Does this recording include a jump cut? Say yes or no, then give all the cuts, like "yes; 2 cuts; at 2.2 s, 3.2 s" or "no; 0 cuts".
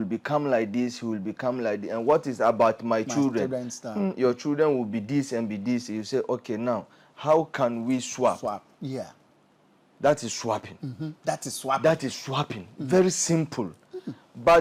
no; 0 cuts